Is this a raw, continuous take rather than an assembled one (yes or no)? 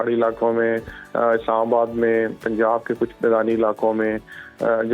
yes